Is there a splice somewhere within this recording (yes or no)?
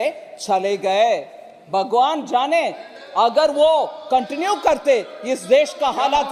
no